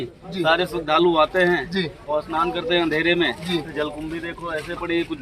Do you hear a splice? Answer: no; 0 cuts

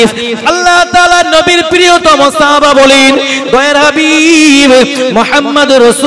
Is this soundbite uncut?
yes; 0 cuts

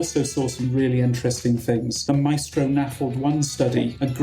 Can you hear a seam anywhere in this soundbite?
yes; 1 cut; at 2.0 s

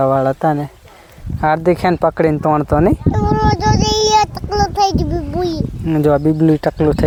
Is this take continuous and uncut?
yes; 0 cuts

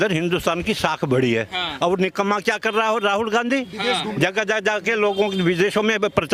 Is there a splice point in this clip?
no; 0 cuts

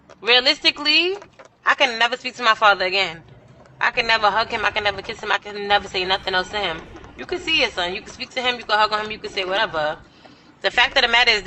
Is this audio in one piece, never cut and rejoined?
yes; 0 cuts

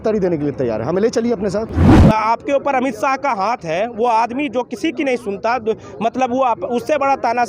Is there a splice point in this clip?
yes; 1 cut; at 1.9 s

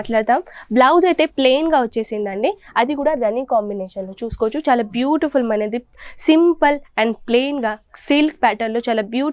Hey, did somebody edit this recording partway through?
no; 0 cuts

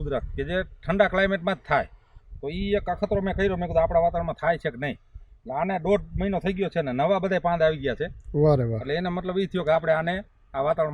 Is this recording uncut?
yes; 0 cuts

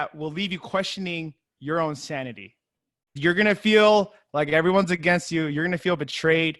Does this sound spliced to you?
yes; 1 cut; at 3.2 s

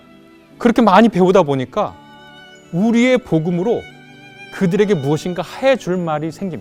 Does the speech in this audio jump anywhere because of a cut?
no; 0 cuts

